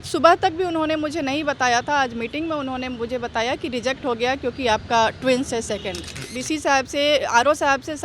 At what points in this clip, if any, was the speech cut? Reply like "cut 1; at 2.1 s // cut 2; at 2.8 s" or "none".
cut 1; at 6.3 s